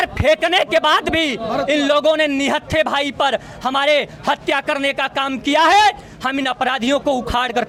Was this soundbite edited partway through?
no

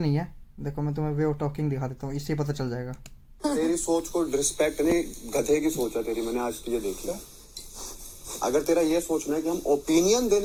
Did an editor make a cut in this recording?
no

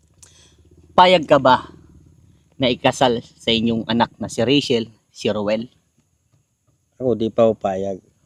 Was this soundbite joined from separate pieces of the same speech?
no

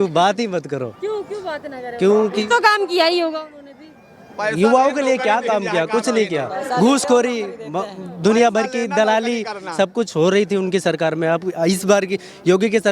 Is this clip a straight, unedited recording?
yes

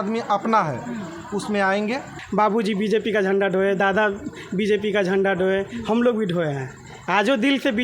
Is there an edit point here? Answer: yes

